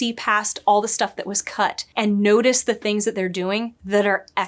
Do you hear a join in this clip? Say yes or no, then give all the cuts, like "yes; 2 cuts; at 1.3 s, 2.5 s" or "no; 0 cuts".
yes; 1 cut; at 1.8 s